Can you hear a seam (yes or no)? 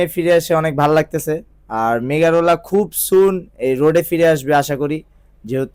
no